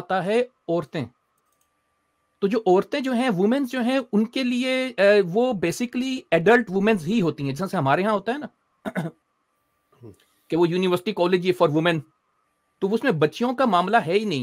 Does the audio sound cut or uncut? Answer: uncut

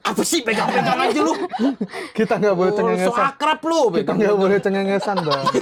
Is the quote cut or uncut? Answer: uncut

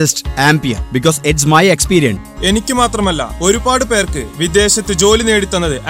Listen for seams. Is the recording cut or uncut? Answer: cut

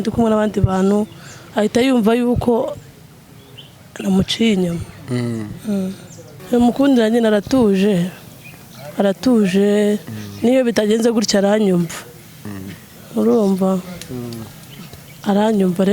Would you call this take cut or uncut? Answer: cut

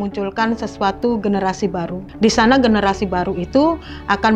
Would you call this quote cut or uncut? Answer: cut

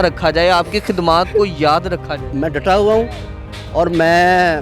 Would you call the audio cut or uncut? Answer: cut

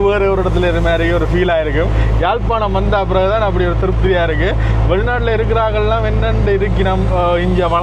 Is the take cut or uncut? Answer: uncut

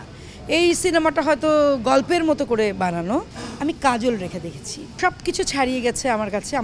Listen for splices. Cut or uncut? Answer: cut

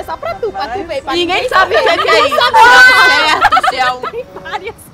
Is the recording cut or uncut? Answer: cut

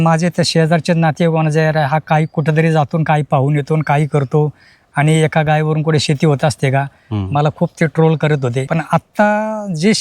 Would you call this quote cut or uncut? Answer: cut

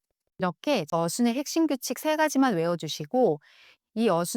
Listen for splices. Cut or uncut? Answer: cut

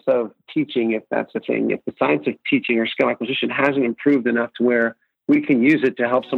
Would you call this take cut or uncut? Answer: uncut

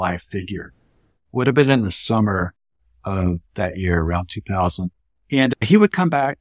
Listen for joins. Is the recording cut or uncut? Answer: cut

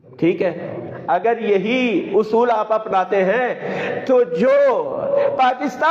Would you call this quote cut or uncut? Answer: uncut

